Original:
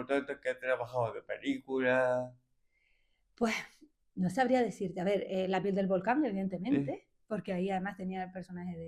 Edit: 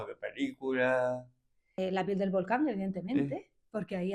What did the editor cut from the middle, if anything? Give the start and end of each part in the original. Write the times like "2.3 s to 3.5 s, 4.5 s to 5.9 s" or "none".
2.8 s to 5.3 s